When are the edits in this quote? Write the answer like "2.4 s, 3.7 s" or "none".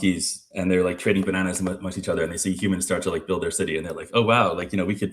3.8 s

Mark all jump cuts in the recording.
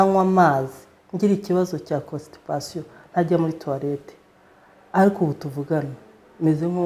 none

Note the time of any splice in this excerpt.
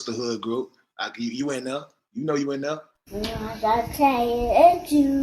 3.0 s

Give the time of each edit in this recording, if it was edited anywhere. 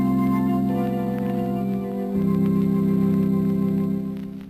3.5 s

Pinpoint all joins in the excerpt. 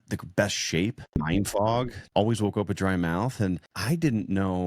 1.2 s, 2.0 s, 3.7 s

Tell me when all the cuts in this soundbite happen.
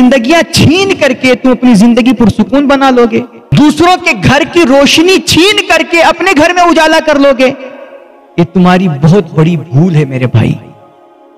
3.4 s

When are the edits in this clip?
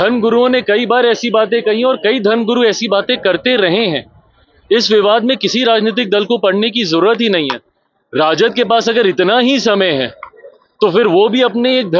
none

